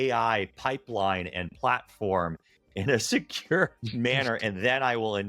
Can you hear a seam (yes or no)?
no